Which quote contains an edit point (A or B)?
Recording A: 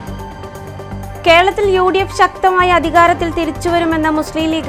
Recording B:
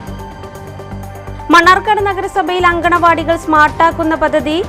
A